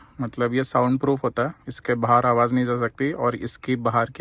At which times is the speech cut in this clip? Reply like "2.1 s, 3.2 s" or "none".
none